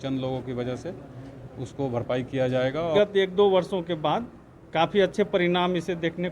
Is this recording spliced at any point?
yes; 1 cut; at 2.9 s

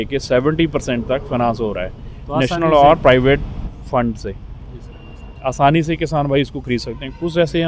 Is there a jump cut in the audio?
no; 0 cuts

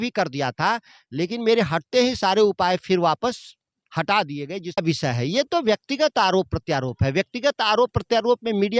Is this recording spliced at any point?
yes; 1 cut; at 4.8 s

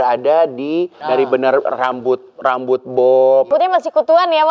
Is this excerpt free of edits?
no; 2 cuts; at 1.0 s, 3.5 s

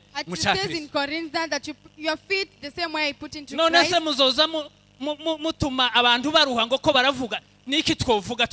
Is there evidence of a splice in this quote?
no; 0 cuts

